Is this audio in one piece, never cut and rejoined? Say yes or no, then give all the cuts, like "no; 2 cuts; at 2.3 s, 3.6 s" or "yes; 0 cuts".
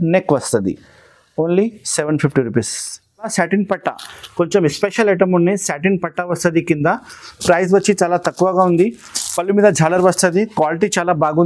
no; 1 cut; at 3.3 s